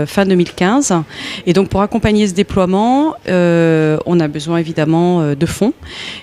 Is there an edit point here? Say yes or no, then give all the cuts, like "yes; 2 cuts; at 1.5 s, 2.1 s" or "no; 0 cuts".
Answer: yes; 1 cut; at 3.4 s